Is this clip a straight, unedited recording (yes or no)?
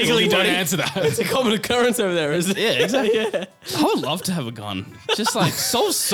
yes